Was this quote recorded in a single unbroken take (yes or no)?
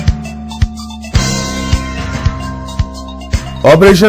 yes